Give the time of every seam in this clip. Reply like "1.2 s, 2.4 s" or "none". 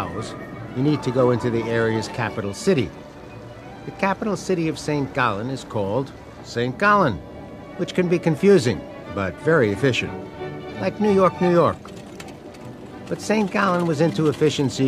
6.9 s